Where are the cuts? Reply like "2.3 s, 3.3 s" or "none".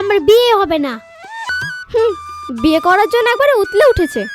1.4 s

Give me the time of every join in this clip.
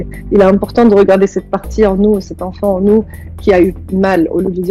none

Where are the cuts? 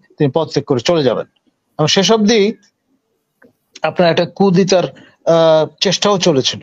none

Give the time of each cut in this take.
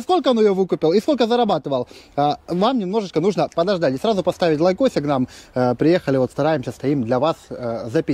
none

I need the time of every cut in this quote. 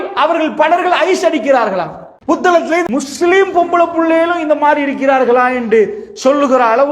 2.5 s

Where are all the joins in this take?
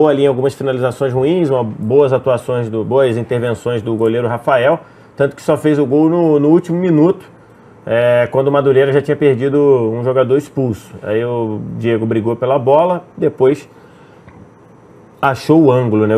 3.1 s

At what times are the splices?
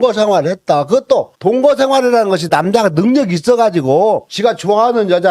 none

